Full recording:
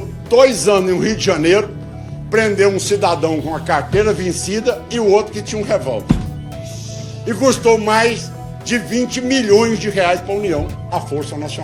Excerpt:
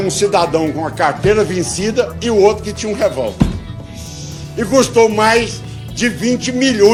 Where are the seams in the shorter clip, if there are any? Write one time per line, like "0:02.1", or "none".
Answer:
none